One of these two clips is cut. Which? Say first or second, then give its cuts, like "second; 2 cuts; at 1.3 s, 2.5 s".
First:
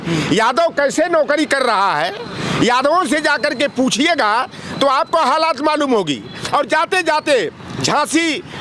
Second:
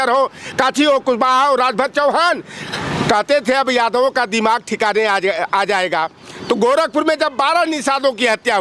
first; 1 cut; at 6.4 s